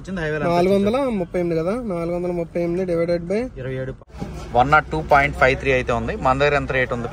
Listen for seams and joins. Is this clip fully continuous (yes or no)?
no